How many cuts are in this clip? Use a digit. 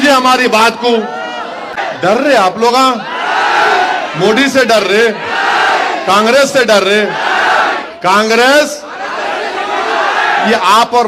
1